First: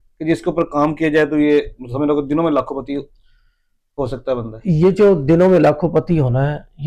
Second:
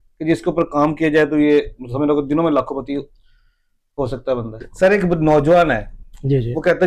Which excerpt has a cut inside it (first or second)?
second